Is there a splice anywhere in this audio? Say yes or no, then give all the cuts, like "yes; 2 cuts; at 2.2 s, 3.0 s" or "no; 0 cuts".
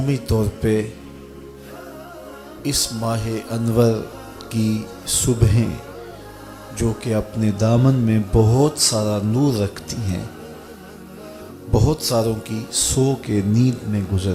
no; 0 cuts